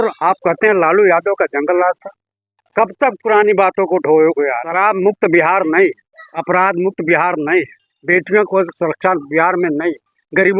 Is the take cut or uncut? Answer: cut